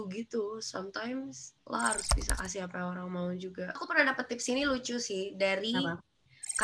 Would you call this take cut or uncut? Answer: uncut